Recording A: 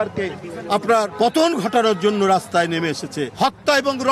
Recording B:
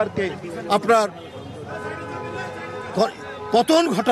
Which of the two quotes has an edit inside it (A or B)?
A